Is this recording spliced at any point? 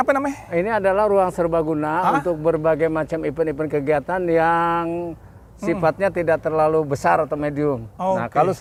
no; 0 cuts

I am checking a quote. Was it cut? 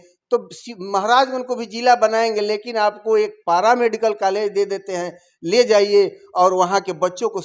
no; 0 cuts

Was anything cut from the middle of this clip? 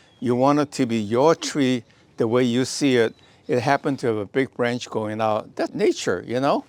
yes; 1 cut; at 5.7 s

